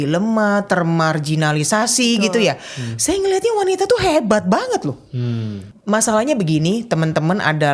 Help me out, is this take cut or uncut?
cut